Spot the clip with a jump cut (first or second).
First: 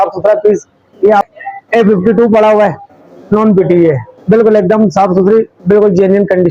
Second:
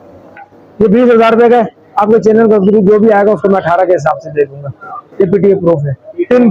first